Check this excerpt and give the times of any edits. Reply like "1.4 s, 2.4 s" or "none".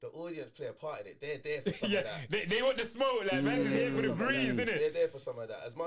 none